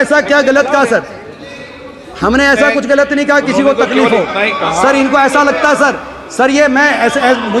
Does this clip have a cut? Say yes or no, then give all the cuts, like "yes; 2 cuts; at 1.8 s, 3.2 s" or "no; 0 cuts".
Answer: no; 0 cuts